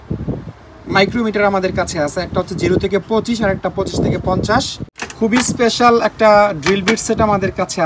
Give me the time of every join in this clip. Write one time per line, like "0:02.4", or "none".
0:04.8